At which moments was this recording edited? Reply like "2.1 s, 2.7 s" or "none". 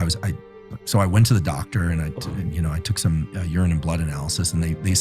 none